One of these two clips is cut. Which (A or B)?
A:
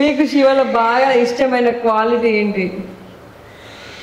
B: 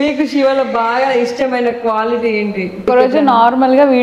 B